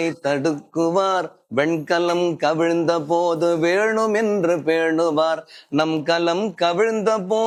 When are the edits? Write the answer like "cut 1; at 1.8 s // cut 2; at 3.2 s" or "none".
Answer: none